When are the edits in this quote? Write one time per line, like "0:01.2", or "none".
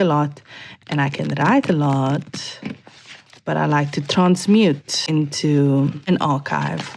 0:05.0
0:06.1